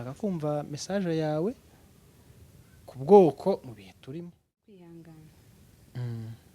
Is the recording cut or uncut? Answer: cut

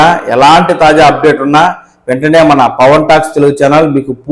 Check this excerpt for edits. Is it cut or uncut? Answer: uncut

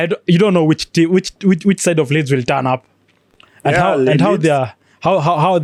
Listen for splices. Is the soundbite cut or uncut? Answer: uncut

